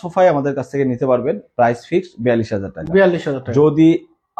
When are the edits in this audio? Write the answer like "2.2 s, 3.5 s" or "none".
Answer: none